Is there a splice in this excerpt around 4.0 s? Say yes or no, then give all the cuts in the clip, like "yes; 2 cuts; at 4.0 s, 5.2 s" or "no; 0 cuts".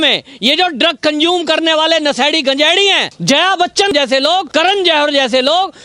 yes; 2 cuts; at 3.1 s, 4.0 s